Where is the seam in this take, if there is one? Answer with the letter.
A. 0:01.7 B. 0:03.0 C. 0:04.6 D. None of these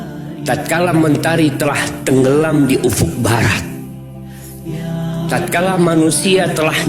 D